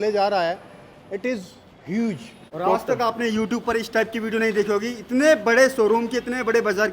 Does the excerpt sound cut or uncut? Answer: cut